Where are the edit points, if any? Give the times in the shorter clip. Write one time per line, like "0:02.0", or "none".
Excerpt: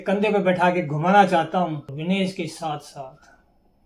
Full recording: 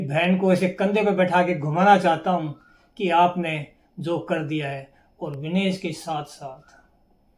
0:01.9